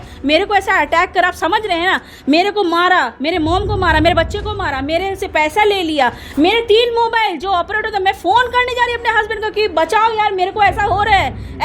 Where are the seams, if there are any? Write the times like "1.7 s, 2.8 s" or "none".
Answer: none